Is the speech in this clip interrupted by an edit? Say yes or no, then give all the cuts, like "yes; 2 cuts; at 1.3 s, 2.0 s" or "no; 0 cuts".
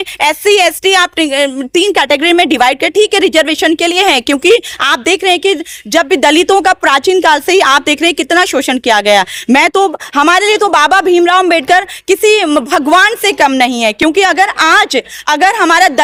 no; 0 cuts